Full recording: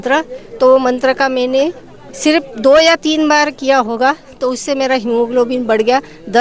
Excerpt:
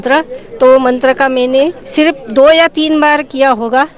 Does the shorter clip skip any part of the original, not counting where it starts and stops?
yes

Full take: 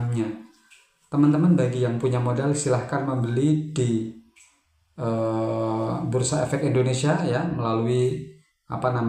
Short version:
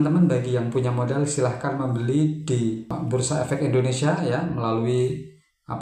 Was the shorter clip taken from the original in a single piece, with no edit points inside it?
no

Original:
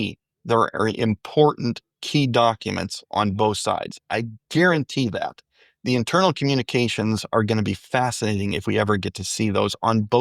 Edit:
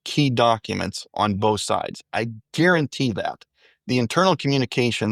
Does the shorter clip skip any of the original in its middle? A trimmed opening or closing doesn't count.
no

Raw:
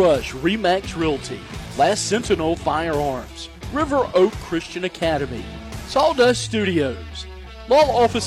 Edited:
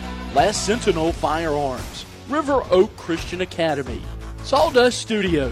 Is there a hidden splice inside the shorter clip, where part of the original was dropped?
no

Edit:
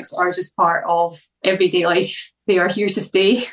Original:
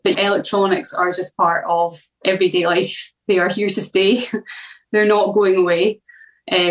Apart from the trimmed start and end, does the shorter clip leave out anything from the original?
no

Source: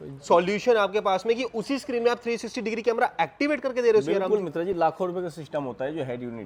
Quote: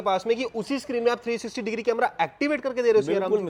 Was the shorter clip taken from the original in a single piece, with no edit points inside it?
yes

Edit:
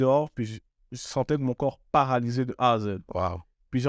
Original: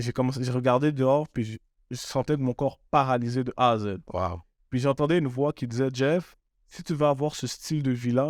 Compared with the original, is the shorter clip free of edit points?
yes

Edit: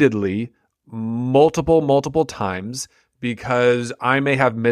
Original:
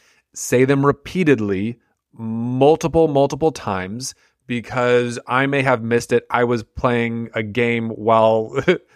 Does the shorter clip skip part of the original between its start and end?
no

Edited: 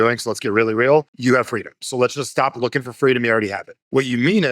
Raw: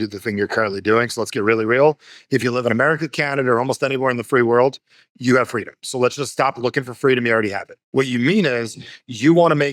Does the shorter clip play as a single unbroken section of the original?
no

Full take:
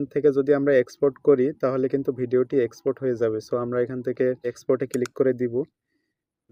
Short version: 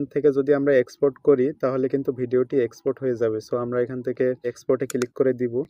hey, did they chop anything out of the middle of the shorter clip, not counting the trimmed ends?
no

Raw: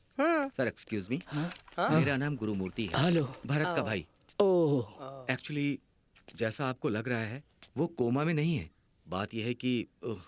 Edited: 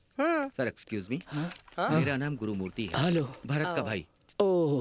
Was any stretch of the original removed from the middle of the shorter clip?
no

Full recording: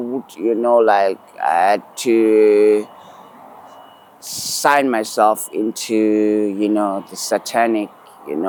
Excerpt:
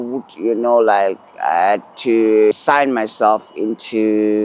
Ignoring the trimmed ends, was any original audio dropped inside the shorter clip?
yes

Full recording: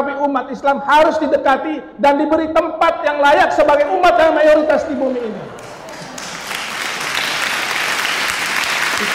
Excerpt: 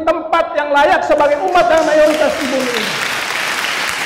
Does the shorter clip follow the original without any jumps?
no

